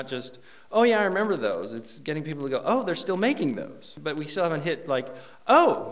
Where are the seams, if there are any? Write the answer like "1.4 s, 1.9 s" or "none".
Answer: 4.0 s

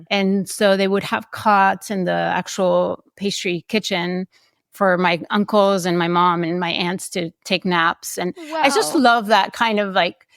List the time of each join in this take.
none

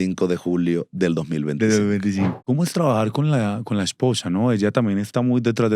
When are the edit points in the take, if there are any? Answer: 2.3 s

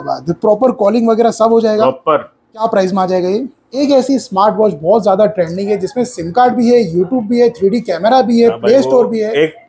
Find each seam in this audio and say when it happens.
2.6 s, 3.8 s

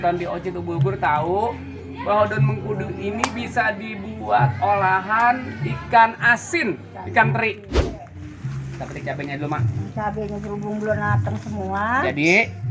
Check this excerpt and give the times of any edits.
8.1 s

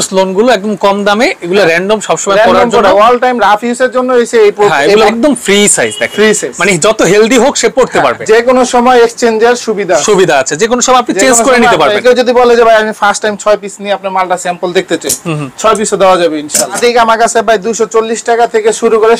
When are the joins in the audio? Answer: 5.1 s, 8.2 s, 12.0 s, 16.8 s

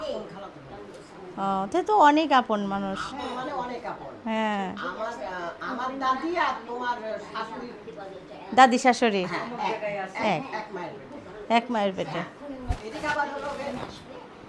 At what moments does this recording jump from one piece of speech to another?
none

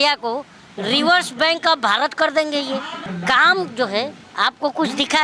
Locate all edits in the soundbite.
3.0 s, 4.2 s

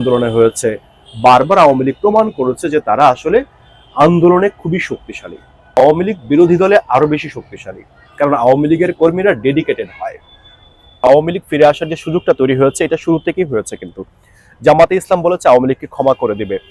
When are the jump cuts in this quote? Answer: 5.8 s, 10.9 s

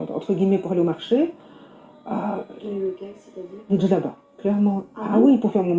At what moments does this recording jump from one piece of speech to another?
none

